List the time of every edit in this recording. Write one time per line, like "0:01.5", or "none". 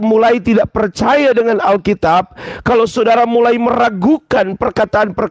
none